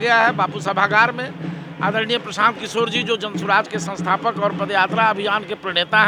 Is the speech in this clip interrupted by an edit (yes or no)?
no